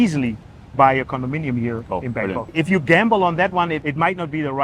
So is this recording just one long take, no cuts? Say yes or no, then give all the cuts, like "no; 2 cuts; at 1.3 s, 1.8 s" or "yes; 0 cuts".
no; 1 cut; at 2.5 s